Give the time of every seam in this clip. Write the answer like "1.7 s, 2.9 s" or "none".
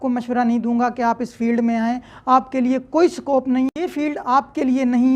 3.7 s

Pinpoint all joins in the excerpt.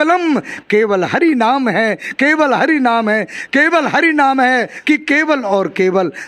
4.7 s

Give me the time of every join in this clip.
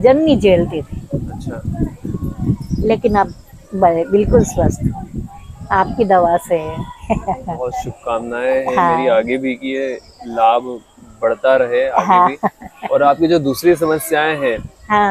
none

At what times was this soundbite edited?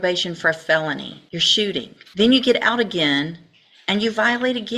1.2 s, 2.0 s

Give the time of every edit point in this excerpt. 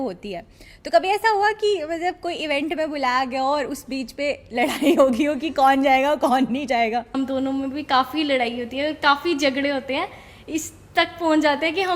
7.1 s

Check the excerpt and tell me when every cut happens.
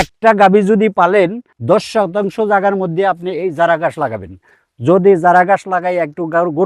1.5 s

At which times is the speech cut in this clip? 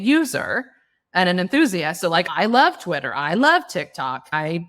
2.3 s

